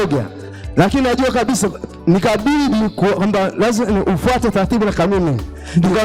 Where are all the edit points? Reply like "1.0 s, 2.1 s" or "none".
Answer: none